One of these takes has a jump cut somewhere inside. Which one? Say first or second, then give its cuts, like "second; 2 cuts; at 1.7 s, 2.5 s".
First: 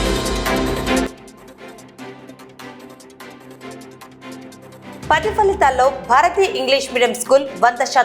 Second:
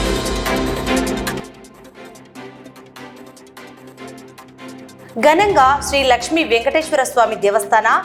first; 2 cuts; at 1.1 s, 4.7 s